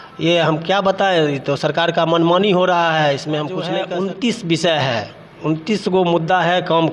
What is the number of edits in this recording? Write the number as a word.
one